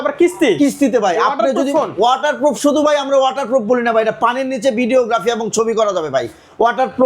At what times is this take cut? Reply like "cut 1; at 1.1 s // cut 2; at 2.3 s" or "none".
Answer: none